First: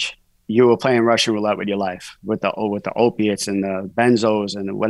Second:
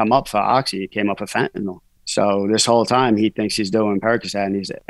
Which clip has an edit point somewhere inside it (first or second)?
second